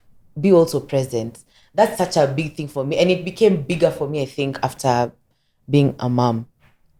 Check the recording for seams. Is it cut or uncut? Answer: uncut